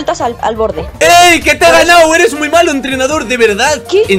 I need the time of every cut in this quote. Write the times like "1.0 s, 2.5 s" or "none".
1.0 s